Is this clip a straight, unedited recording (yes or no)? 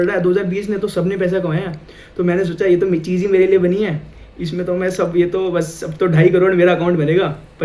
yes